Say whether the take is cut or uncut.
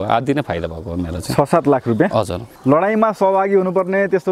cut